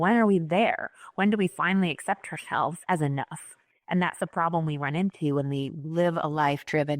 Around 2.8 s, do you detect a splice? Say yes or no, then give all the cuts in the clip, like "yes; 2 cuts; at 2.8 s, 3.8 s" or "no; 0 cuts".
yes; 1 cut; at 2.8 s